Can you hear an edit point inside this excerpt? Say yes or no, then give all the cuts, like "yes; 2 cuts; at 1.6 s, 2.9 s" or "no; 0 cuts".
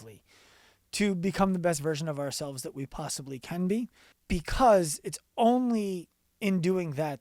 yes; 1 cut; at 4.1 s